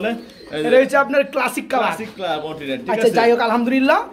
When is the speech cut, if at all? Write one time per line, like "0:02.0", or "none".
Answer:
none